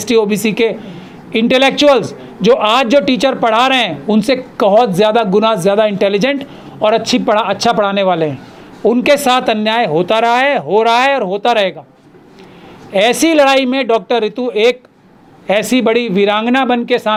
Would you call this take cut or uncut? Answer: uncut